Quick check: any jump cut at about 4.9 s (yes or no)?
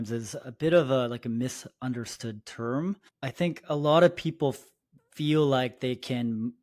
no